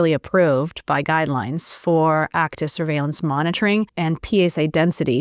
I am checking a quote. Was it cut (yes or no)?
yes